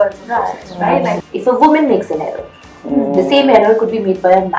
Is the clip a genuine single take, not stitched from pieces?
no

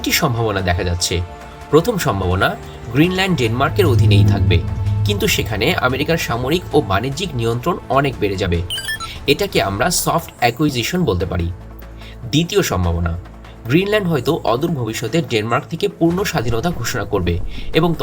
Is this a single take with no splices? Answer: yes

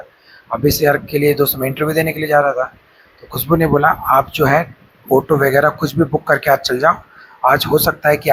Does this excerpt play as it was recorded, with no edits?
yes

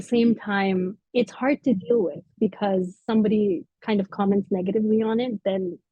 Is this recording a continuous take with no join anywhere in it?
no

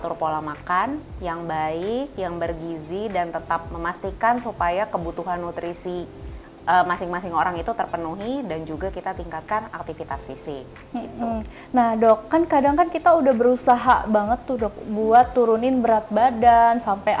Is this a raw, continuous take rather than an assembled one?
yes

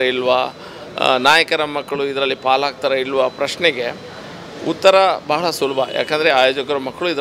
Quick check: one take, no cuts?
yes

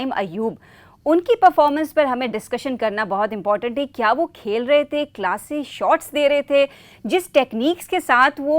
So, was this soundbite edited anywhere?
no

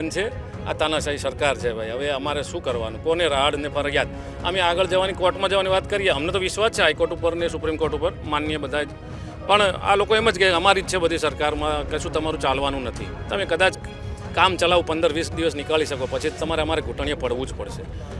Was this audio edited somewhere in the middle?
no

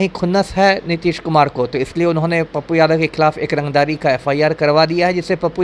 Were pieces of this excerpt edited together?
no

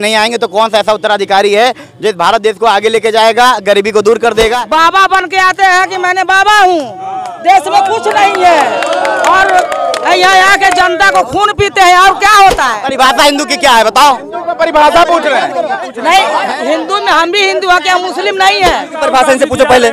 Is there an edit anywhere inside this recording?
yes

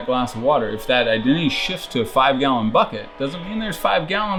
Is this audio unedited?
yes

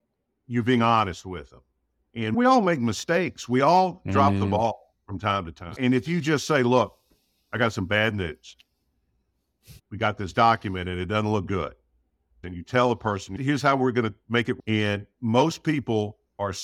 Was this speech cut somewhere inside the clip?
yes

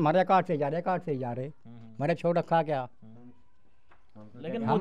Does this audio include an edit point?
no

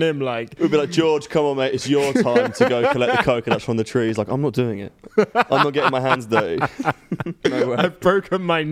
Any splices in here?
no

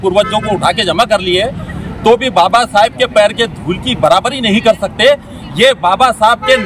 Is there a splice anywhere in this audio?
no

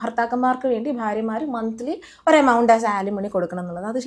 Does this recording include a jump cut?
no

